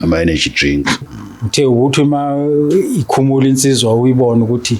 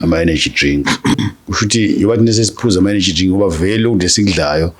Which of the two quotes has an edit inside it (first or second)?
first